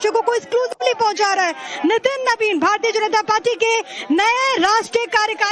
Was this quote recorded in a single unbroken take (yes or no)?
yes